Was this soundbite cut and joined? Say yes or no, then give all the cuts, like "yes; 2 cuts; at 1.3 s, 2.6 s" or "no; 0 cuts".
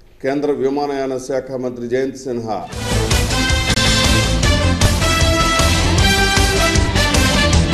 no; 0 cuts